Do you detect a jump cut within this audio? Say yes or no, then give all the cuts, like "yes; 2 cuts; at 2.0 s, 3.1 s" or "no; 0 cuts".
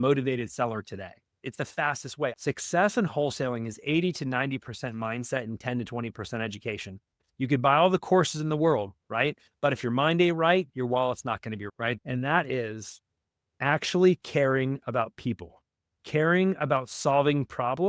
yes; 2 cuts; at 2.4 s, 12.0 s